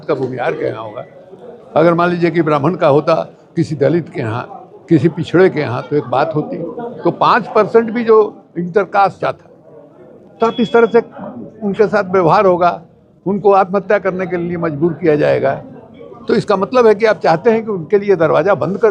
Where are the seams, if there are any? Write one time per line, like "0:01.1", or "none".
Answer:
0:09.2